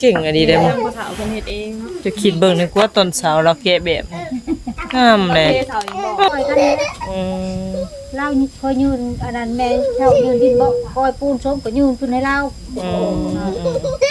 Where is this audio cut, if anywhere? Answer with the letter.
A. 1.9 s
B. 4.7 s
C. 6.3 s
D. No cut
C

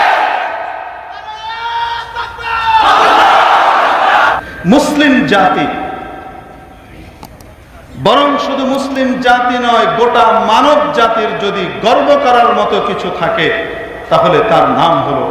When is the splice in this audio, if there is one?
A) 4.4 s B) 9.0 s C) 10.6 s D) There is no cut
A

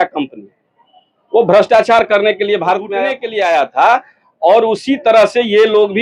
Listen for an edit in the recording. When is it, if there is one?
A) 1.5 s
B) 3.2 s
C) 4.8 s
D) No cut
B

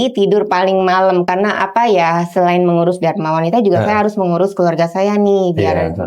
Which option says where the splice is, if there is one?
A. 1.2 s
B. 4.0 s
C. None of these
C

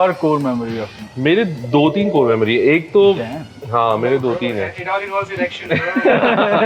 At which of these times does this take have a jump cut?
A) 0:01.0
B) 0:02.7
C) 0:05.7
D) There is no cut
A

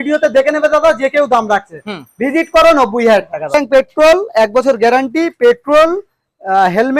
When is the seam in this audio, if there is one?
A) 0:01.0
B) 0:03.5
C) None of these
B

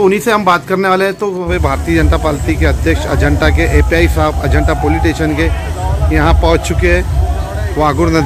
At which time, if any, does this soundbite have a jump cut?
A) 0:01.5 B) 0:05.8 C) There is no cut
A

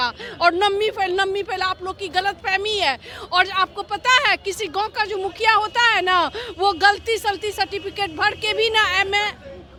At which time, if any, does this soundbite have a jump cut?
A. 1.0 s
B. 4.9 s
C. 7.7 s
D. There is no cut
D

